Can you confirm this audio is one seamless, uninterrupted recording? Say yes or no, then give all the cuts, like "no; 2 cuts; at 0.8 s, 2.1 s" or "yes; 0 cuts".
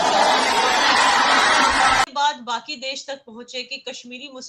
no; 1 cut; at 2.0 s